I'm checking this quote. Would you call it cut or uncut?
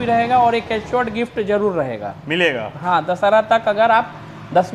uncut